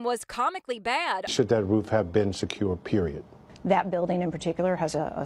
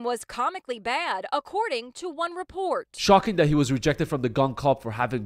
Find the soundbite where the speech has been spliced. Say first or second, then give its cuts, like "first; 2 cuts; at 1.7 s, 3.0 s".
first; 1 cut; at 1.2 s